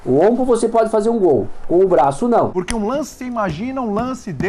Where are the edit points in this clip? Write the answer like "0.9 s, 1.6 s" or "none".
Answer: 2.6 s